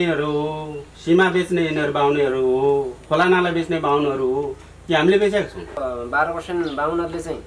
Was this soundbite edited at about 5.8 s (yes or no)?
yes